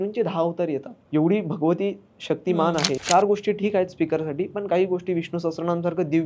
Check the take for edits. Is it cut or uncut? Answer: cut